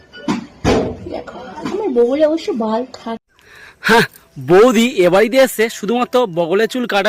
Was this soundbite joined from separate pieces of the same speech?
yes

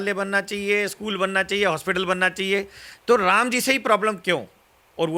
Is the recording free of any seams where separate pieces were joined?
yes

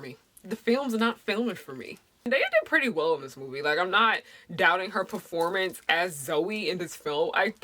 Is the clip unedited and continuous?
no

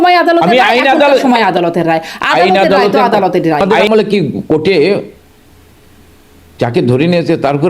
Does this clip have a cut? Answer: yes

